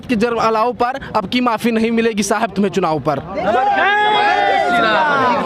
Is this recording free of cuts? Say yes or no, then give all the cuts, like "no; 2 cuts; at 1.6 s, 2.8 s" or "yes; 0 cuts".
yes; 0 cuts